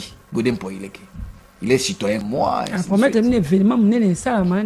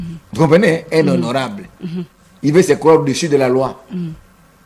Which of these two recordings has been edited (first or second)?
first